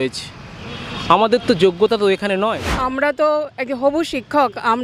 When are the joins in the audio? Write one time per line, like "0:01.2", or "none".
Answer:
0:02.8

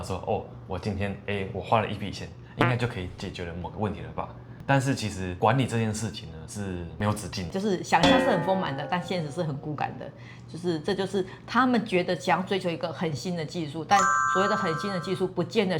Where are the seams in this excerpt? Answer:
0:04.5
0:07.5

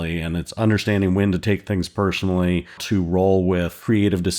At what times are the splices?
0:02.8

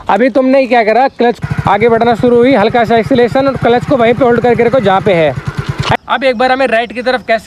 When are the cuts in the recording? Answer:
0:01.4
0:05.9

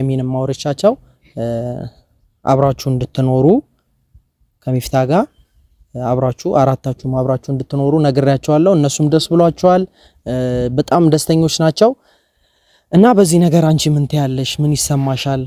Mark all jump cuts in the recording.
none

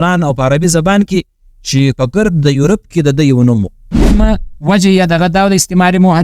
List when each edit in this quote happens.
0:04.2

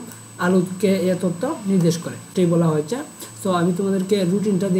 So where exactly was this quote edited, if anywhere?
0:02.3

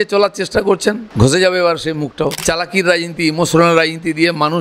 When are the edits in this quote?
0:01.1
0:02.4

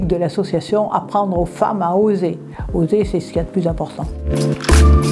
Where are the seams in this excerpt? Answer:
0:04.2

